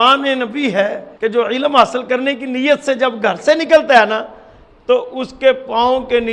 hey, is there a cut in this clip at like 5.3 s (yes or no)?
no